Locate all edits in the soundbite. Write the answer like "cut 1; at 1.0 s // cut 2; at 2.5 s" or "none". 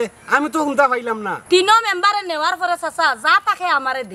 none

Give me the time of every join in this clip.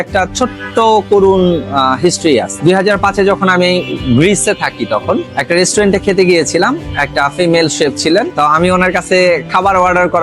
cut 1; at 2.5 s // cut 2; at 5.3 s // cut 3; at 8.3 s

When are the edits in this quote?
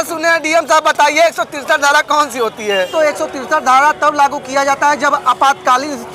cut 1; at 2.9 s

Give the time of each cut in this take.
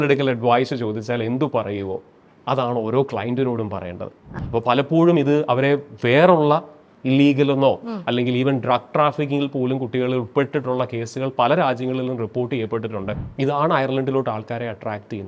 cut 1; at 4.3 s // cut 2; at 13.1 s

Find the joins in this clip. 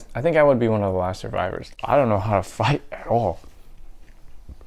cut 1; at 1.7 s

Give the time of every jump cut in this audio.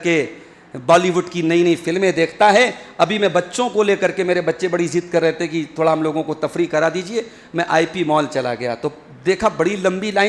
none

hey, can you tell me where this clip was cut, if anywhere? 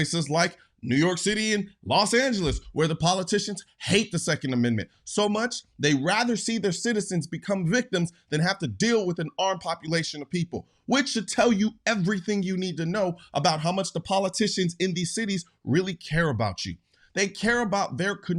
cut 1; at 2.6 s

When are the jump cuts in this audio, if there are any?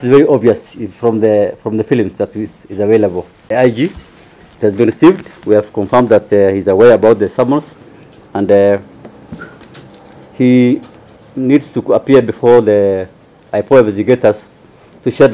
cut 1; at 3.3 s

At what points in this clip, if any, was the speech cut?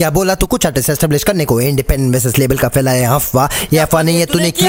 none

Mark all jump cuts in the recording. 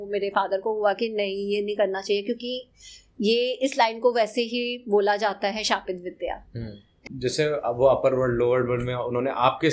cut 1; at 6.9 s

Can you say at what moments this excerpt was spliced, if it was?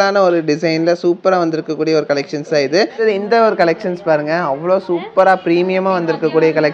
cut 1; at 2.9 s

